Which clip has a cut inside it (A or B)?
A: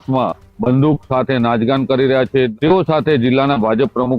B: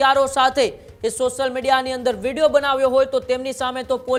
A